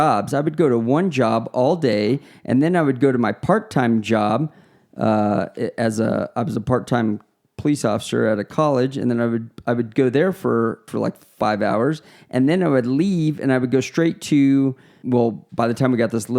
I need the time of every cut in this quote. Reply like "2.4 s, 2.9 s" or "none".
10.9 s, 15.0 s